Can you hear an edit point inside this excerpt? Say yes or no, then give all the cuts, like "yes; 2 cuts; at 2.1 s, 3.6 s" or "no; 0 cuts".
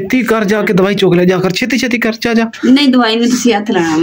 no; 0 cuts